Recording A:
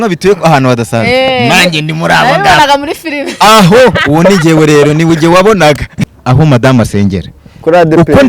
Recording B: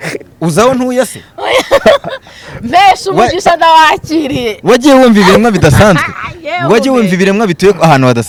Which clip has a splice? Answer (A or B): A